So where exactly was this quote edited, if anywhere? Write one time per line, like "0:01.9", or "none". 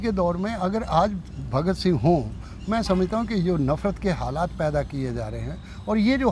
none